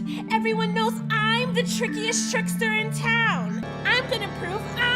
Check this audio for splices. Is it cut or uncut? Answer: cut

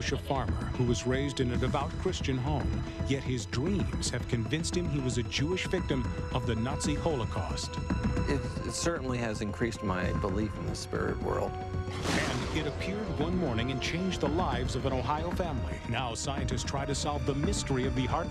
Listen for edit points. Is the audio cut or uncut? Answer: uncut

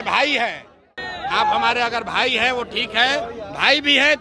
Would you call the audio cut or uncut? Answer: cut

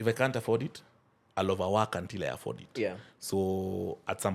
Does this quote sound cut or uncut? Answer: uncut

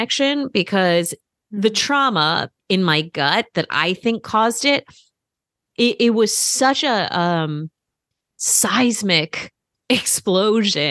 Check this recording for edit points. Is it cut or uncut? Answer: cut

